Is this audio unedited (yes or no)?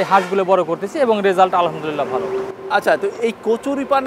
yes